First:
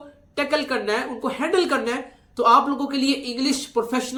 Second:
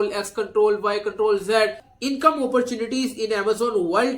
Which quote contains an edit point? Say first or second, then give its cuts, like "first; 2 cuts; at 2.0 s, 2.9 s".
second; 1 cut; at 2.1 s